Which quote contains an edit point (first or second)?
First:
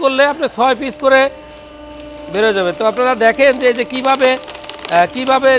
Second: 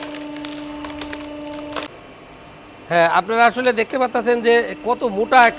second